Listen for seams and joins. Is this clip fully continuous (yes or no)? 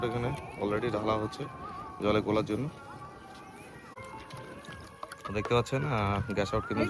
yes